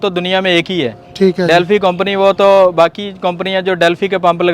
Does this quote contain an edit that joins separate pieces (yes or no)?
no